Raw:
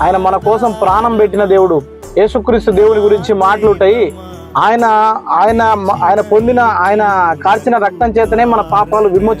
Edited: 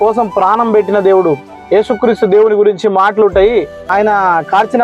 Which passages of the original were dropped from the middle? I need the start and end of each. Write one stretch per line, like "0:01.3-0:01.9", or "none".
0:04.3-0:06.8

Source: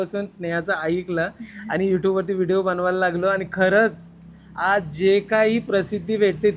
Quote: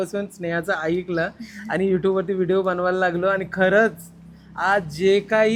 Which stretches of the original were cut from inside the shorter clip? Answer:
none

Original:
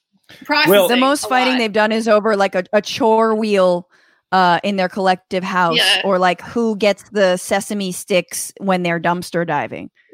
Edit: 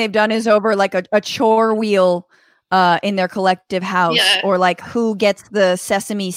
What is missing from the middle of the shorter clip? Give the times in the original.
none

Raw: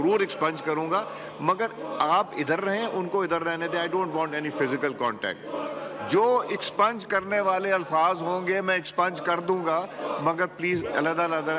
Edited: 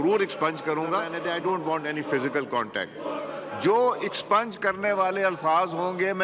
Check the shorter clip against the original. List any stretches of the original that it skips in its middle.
0:01.1-0:03.6

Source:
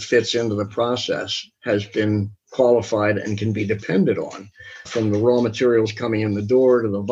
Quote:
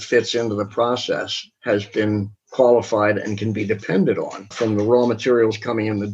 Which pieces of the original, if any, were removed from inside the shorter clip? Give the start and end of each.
0:04.4-0:04.8

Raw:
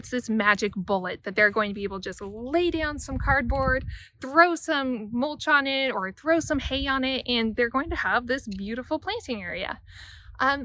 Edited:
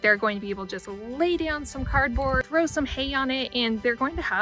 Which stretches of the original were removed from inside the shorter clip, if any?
0:03.8-0:06.2

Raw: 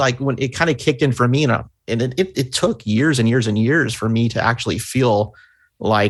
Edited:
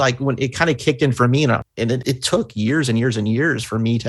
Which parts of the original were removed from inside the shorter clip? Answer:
0:02.0-0:02.3

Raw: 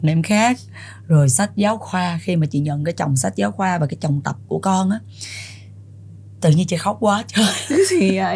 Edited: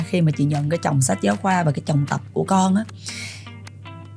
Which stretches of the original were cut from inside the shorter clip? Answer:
none

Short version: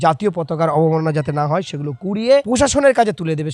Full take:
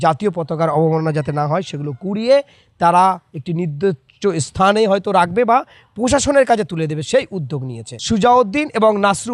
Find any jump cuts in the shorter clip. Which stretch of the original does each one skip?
0:02.5-0:06.0

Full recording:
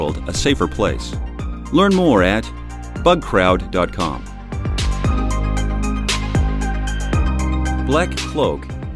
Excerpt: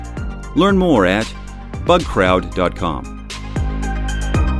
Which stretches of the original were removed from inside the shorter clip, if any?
0:04.4-0:06.0

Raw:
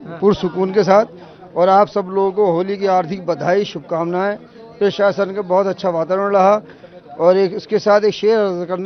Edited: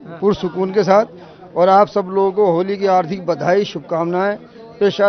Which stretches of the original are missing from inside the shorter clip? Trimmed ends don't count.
none

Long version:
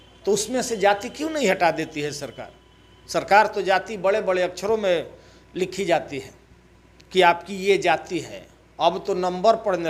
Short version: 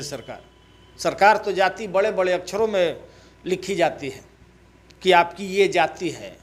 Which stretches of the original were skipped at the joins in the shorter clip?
none

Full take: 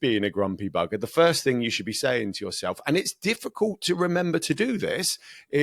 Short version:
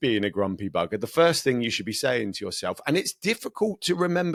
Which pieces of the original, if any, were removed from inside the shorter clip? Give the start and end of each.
none

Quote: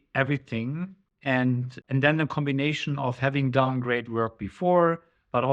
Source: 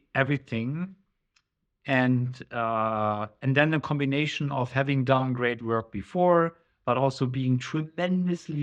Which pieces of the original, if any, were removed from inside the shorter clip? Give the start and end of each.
0:01.0-0:01.7
0:02.4-0:03.3

